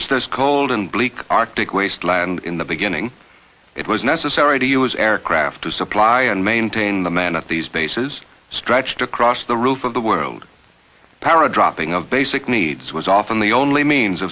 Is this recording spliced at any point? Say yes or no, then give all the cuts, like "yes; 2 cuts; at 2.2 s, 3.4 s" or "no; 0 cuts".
yes; 1 cut; at 11.5 s